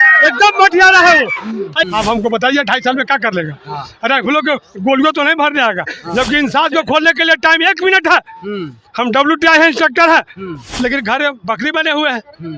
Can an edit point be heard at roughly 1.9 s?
yes; 1 cut; at 1.9 s

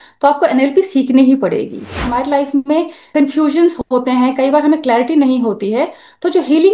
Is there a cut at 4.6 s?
no; 2 cuts; at 2.0 s, 3.1 s

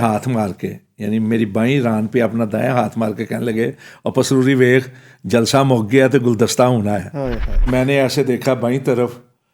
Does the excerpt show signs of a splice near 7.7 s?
yes; 1 cut; at 7.7 s

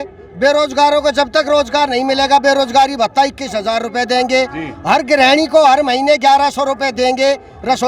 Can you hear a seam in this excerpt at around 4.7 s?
no; 0 cuts

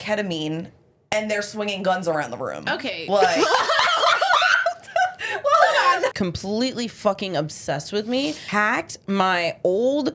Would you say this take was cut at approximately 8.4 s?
yes; 2 cuts; at 6.1 s, 8.4 s

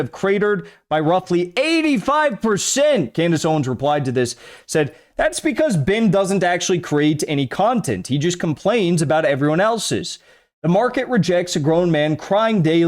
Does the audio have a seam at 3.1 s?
yes; 1 cut; at 3.1 s

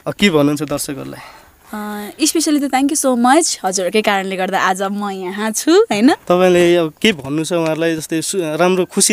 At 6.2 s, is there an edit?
yes; 1 cut; at 6.2 s

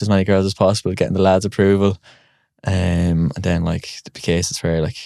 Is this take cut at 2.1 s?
no; 0 cuts

